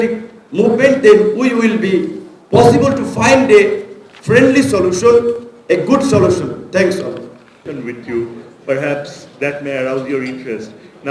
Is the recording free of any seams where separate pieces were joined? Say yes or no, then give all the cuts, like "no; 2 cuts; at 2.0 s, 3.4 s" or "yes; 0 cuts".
yes; 0 cuts